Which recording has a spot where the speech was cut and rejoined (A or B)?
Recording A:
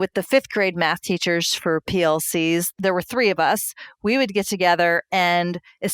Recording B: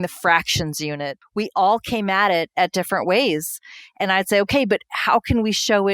B